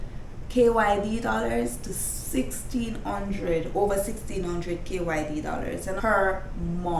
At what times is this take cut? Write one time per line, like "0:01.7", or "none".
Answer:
0:06.0